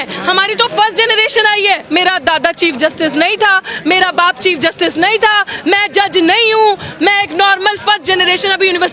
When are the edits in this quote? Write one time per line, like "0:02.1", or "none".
0:01.8